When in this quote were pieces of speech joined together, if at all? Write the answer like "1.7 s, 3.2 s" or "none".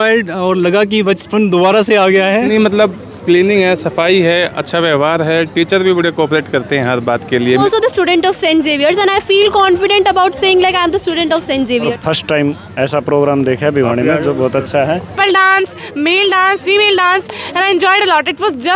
2.5 s, 7.6 s, 11.9 s, 15.1 s